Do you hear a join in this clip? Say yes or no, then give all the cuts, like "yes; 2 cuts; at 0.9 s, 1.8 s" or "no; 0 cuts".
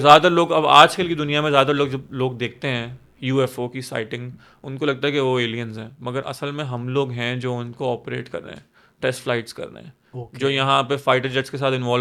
no; 0 cuts